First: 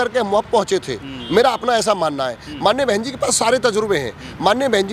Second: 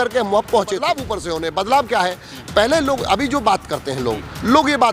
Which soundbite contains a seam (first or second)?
second